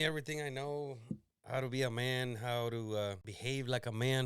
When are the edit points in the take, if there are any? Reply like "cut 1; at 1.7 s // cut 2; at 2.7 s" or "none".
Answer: cut 1; at 3.3 s